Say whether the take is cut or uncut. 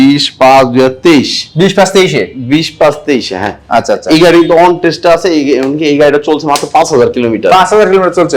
uncut